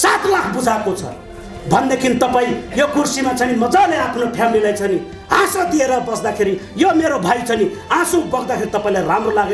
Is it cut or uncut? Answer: uncut